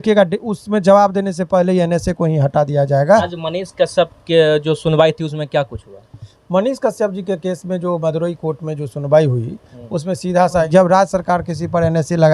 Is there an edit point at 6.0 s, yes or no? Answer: no